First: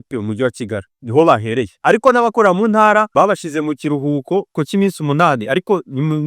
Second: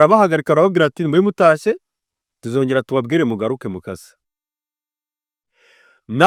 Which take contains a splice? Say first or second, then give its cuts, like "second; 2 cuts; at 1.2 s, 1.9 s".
first; 4 cuts; at 1.0 s, 1.7 s, 3.1 s, 4.5 s